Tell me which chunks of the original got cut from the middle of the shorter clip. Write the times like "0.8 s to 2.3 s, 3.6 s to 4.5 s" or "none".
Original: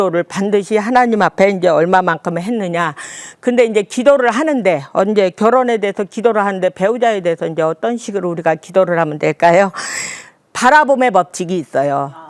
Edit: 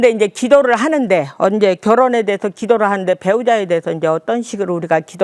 none